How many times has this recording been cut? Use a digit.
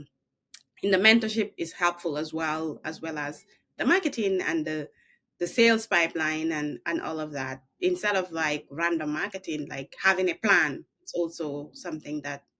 1